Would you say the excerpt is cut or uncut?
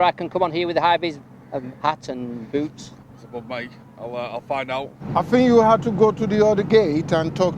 cut